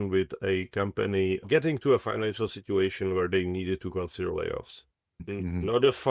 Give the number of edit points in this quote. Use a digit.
2